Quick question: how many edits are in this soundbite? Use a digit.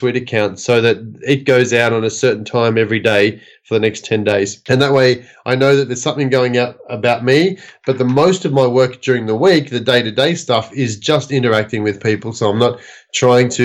1